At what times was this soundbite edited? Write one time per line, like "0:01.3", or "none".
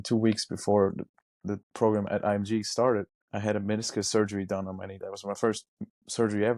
0:03.2